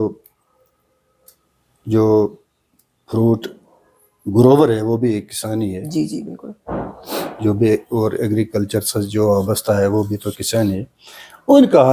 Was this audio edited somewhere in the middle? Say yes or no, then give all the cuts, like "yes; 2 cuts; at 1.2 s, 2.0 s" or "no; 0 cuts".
no; 0 cuts